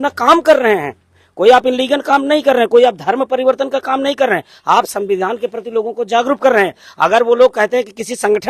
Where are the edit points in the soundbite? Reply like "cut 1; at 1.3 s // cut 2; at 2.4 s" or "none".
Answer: none